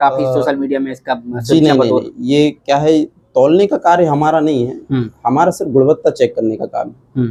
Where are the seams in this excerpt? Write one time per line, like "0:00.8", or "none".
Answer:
none